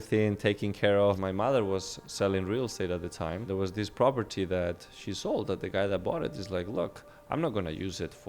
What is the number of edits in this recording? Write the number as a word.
two